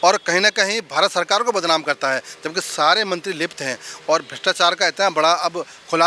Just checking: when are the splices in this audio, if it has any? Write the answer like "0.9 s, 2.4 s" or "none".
none